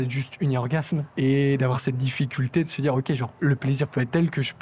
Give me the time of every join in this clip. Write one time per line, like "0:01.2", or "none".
0:01.1
0:03.3